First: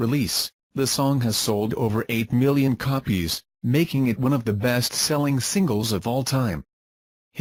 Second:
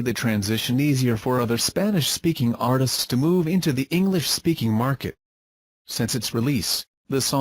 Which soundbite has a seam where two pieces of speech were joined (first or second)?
second